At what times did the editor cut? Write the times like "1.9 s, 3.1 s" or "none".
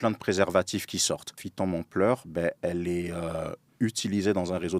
1.4 s